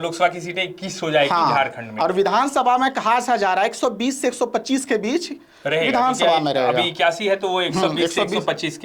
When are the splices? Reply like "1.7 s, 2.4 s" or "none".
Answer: none